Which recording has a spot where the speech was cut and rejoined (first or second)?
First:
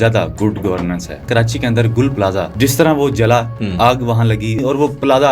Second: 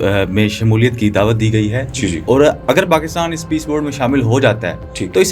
first